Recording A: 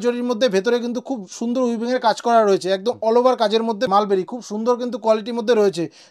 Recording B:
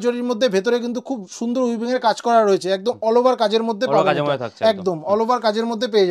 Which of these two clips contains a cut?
A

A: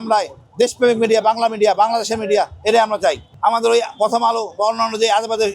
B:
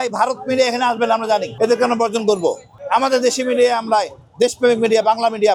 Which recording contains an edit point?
A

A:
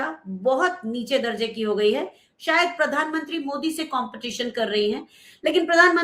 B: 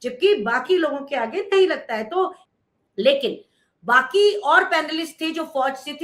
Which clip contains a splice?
B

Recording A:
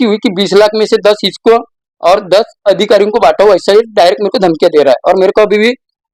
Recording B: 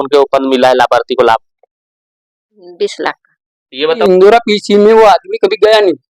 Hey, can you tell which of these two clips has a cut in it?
B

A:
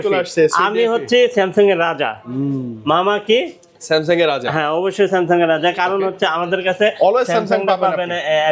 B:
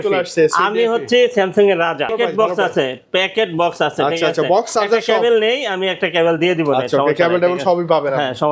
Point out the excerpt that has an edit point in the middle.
B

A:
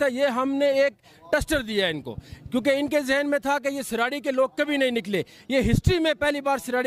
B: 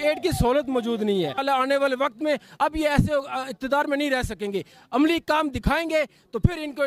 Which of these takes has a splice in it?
B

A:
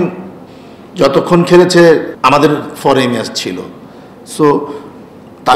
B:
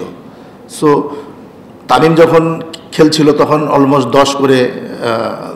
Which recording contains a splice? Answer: A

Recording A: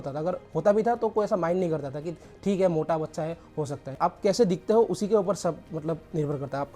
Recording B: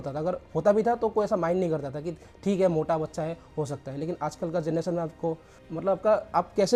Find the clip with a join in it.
A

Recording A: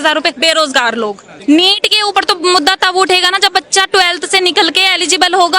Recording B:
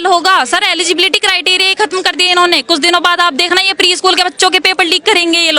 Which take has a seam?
A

